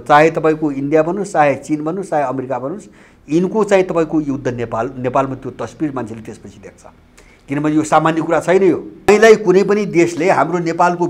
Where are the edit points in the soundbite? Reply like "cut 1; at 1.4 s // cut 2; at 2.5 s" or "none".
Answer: cut 1; at 9.1 s